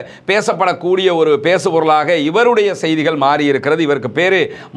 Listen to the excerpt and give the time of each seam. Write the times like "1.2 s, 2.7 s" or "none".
none